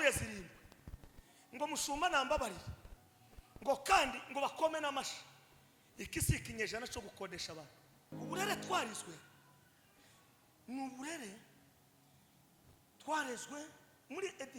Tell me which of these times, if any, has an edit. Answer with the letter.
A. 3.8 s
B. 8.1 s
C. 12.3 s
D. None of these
B